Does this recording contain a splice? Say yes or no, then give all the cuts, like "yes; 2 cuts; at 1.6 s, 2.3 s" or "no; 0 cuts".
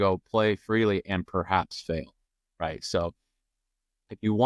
no; 0 cuts